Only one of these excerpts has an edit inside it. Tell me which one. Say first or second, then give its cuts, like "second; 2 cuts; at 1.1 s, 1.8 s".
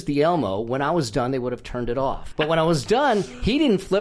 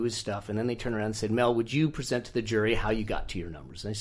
first; 1 cut; at 2.3 s